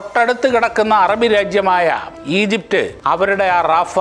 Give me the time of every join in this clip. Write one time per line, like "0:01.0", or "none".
0:02.1
0:02.9

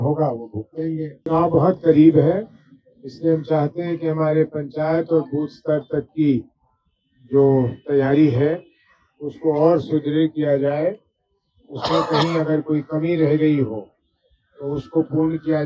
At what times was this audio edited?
0:01.2

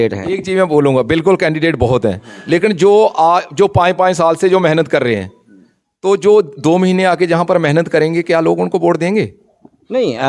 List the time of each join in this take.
none

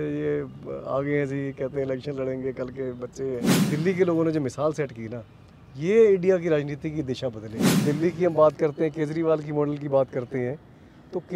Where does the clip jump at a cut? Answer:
0:03.6
0:07.8

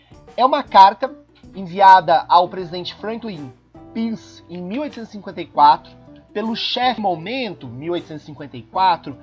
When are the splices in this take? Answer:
0:07.0

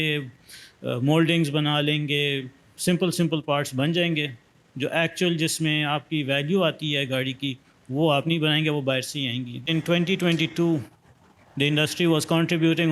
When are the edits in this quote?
0:09.6

